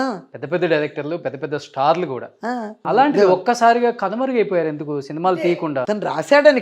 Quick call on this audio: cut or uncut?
cut